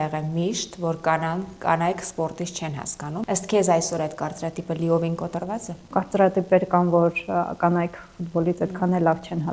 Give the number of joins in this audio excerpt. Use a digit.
2